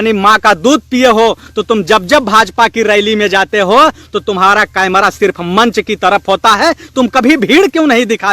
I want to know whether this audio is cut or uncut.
uncut